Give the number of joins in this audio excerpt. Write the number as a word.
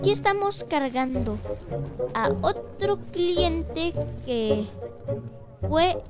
zero